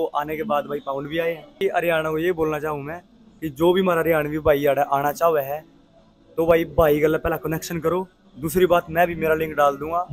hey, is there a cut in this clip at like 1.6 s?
yes; 1 cut; at 1.6 s

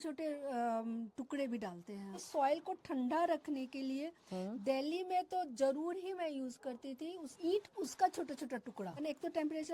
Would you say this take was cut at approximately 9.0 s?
yes; 3 cuts; at 2.0 s, 7.3 s, 9.0 s

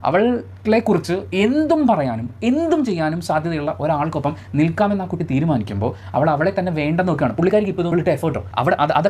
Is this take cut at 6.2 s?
no; 1 cut; at 7.9 s

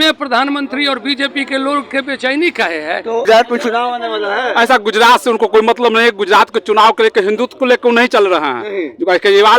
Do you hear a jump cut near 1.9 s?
no; 1 cut; at 3.3 s

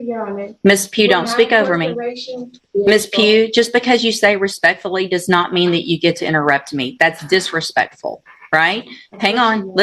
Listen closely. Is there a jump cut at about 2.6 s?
yes; 1 cut; at 2.6 s

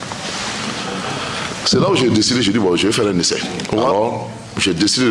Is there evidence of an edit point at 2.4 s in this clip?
no; 1 cut; at 3.9 s

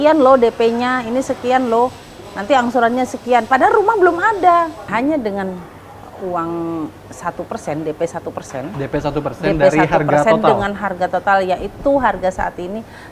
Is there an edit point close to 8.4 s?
no; 1 cut; at 4.9 s

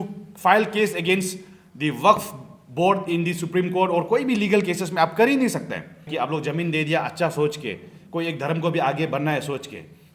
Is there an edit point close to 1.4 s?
no; 1 cut; at 6.1 s

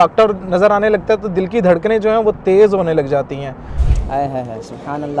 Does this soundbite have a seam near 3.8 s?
yes; 1 cut; at 3.8 s

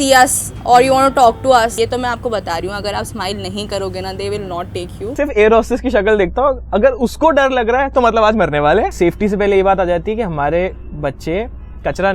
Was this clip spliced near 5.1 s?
yes; 3 cuts; at 1.7 s, 5.1 s, 8.9 s

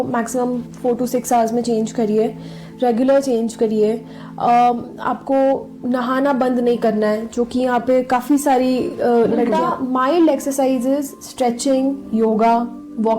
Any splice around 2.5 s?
no; 1 cut; at 9.6 s

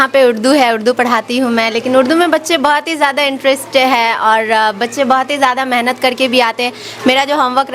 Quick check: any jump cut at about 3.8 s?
no; 0 cuts

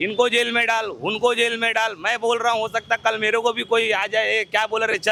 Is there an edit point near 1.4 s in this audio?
no; 0 cuts

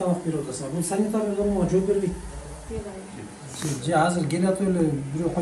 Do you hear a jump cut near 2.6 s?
yes; 1 cut; at 2.6 s

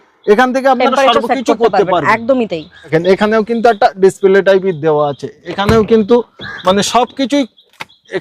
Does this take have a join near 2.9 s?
yes; 1 cut; at 2.9 s

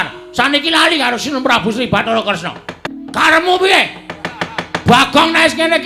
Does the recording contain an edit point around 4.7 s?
no; 1 cut; at 2.8 s

